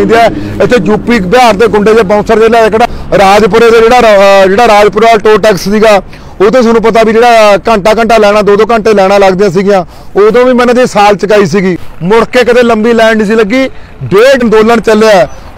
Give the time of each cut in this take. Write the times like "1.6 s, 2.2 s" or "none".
2.9 s, 11.9 s, 14.4 s